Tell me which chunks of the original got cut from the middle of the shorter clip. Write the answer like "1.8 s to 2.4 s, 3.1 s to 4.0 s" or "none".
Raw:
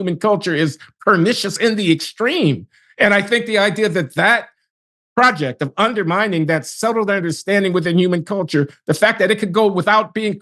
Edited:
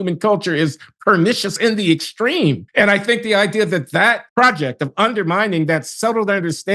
2.6 s to 2.9 s, 4.5 s to 5.0 s

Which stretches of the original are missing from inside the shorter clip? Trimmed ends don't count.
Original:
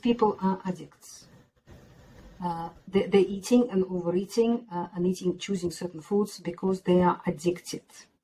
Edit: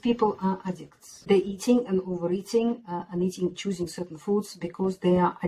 1.2 s to 3.1 s

